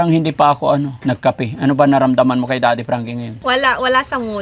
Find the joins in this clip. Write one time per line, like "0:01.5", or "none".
0:00.9
0:03.4